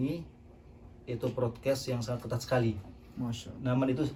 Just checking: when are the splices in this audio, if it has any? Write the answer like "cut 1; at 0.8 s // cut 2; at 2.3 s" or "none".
none